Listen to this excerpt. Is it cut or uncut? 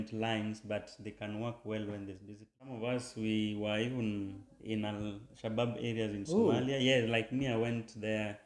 cut